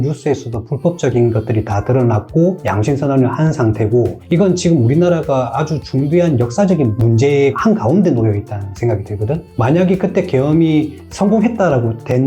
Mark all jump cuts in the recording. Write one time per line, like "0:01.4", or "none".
0:04.2
0:09.5